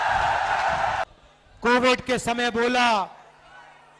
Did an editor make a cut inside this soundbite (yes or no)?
yes